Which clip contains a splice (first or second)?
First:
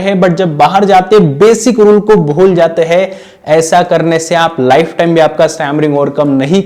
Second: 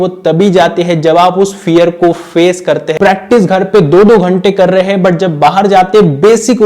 second